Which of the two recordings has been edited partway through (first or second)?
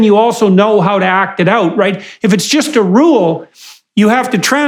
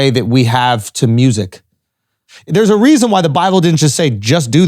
second